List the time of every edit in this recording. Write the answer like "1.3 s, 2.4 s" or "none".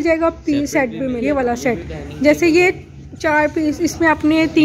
1.2 s